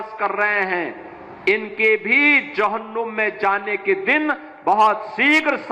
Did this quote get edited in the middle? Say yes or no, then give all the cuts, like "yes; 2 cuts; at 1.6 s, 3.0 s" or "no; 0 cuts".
no; 0 cuts